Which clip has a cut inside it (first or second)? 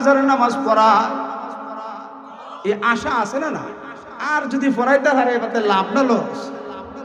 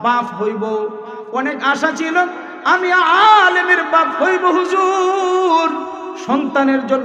first